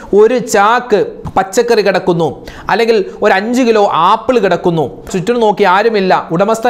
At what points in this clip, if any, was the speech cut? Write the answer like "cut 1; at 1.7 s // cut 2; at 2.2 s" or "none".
cut 1; at 1.2 s // cut 2; at 5.1 s